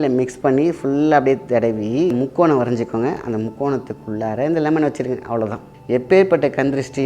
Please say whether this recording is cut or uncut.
cut